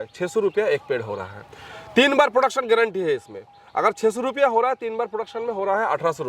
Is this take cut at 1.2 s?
no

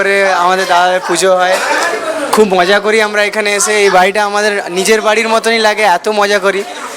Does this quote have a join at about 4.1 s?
no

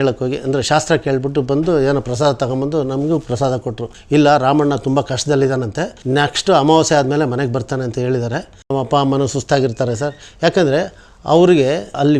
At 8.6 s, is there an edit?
yes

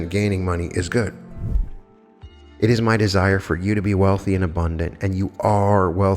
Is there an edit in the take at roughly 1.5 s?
yes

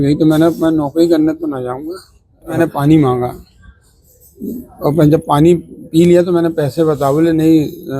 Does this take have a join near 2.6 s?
yes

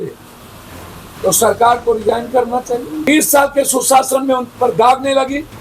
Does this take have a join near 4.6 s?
no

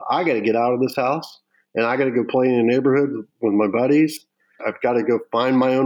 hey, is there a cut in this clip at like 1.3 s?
no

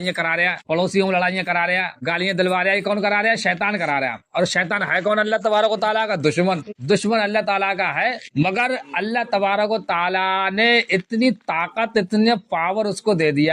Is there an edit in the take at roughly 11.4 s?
no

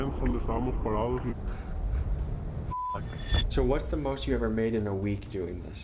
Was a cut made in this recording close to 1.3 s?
yes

